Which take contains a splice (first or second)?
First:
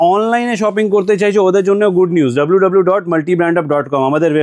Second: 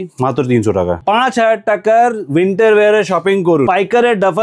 second